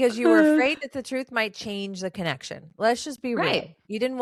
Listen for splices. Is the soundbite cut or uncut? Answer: uncut